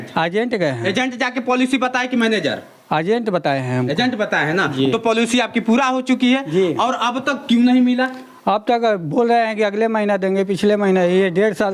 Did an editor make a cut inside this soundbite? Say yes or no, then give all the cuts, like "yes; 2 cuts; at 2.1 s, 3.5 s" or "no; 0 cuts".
no; 0 cuts